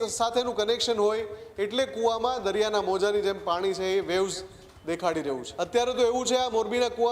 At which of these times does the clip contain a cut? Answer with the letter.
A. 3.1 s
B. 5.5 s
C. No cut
B